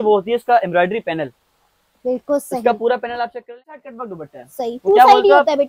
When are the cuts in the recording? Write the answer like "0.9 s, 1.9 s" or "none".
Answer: 3.8 s